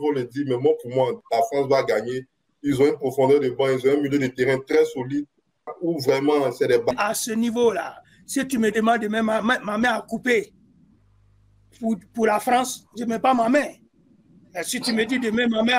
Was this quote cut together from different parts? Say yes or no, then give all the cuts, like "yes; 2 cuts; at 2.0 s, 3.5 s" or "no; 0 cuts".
yes; 2 cuts; at 5.7 s, 6.9 s